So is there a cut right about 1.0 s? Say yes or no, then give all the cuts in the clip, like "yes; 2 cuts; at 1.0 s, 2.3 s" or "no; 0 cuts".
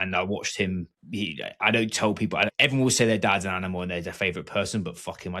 yes; 2 cuts; at 1.0 s, 2.5 s